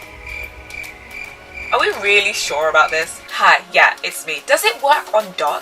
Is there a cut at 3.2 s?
yes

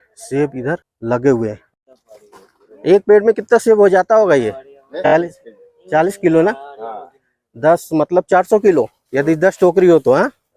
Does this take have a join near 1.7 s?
yes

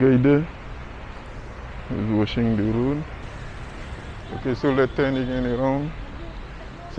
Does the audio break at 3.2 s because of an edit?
yes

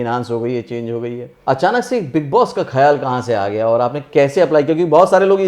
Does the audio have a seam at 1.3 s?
yes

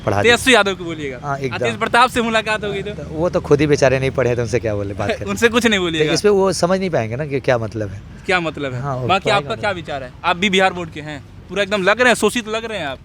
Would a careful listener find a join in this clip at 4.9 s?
no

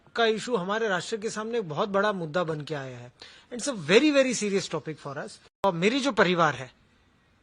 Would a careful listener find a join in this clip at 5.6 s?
yes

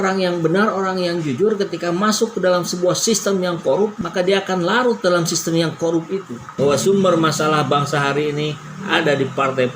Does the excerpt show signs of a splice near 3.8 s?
no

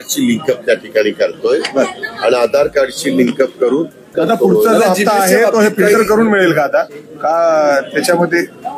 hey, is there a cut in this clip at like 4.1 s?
yes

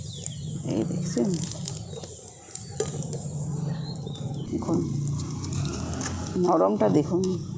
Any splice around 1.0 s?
no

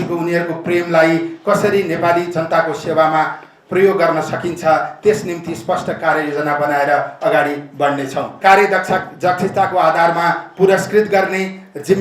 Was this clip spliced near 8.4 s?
yes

